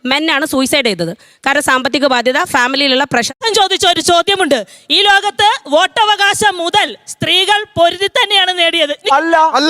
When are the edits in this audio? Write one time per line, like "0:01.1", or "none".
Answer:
0:03.3